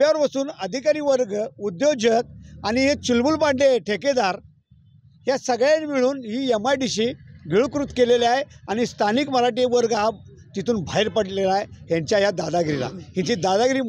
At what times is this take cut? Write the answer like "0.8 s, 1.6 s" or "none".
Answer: none